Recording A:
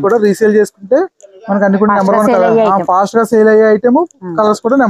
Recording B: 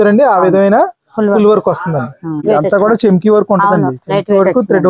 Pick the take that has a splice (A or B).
B